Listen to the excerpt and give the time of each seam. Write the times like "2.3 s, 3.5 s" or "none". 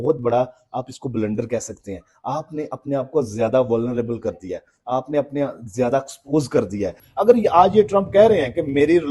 7.0 s